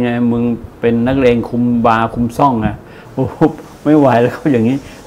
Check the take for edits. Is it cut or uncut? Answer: uncut